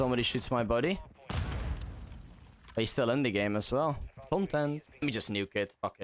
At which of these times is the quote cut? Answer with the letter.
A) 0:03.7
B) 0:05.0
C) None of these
B